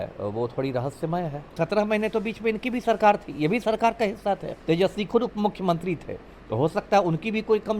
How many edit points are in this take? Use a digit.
2